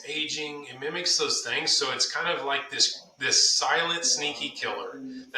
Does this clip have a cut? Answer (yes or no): no